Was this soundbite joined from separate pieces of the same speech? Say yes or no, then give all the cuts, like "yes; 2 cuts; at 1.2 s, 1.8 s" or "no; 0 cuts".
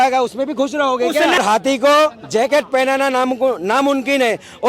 yes; 1 cut; at 1.4 s